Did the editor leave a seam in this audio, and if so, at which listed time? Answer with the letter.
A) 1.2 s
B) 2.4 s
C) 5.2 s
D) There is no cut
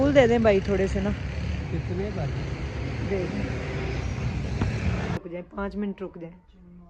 C